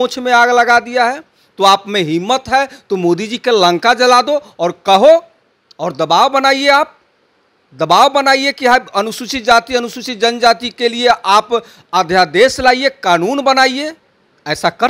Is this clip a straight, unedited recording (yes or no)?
yes